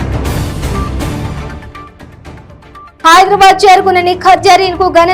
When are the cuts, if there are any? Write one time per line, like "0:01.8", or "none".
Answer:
0:01.3